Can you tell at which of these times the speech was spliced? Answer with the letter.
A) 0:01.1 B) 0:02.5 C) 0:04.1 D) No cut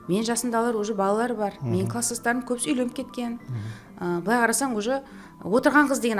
D